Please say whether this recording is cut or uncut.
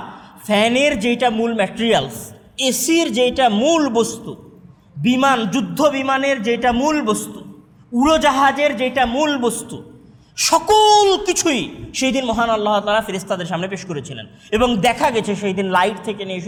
uncut